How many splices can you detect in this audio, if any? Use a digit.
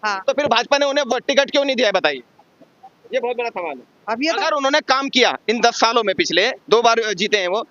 1